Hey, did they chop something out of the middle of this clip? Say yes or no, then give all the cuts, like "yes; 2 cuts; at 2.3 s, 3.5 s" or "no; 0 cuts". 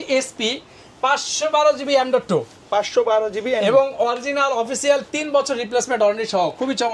no; 0 cuts